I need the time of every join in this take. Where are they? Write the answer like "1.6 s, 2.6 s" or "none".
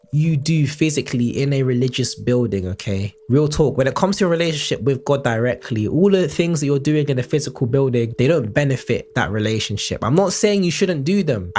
none